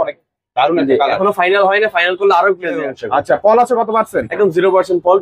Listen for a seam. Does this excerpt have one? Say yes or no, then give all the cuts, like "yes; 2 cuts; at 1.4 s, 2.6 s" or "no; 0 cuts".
yes; 1 cut; at 2.9 s